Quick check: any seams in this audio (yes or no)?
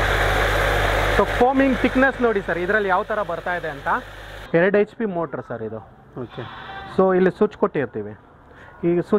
yes